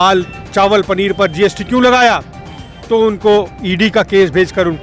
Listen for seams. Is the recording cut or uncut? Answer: uncut